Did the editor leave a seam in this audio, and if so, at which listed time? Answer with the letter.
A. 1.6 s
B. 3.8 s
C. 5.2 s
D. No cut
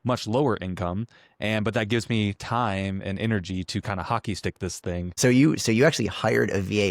C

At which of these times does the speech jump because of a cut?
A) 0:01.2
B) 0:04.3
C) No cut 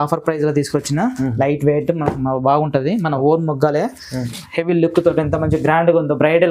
B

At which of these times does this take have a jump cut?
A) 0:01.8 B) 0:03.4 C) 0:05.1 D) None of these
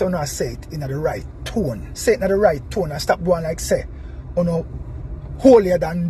A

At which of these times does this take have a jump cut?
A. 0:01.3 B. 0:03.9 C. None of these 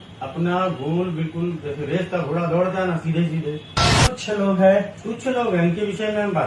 B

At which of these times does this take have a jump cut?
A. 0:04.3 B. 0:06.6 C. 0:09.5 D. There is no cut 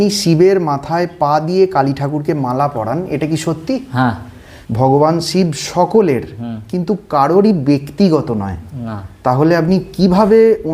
A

